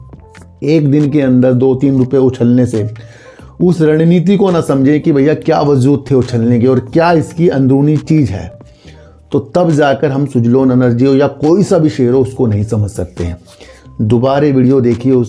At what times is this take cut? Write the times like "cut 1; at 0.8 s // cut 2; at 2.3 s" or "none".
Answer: none